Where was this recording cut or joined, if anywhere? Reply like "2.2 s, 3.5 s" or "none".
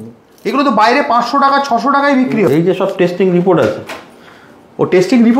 2.5 s